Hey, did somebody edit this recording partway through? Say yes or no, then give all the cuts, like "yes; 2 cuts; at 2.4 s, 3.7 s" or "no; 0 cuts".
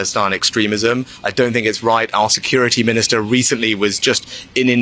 no; 0 cuts